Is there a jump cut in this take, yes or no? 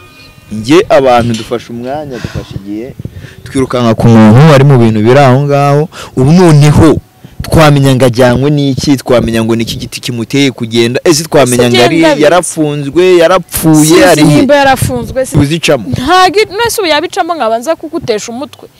yes